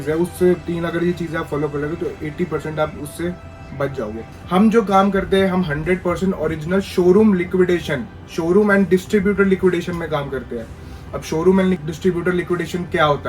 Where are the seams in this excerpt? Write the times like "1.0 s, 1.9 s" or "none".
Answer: 4.3 s, 11.8 s